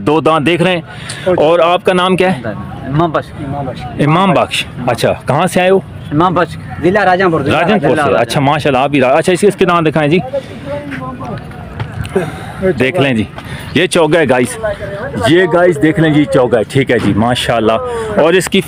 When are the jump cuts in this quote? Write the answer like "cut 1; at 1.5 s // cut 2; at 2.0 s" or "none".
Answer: none